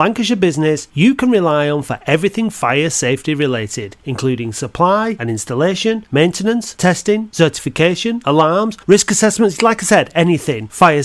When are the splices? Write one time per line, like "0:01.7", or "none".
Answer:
none